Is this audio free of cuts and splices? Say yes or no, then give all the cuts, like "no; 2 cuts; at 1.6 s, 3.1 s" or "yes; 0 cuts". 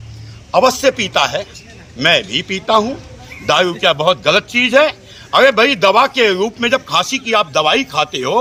yes; 0 cuts